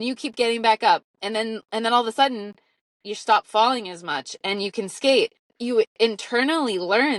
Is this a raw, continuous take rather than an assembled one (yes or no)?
no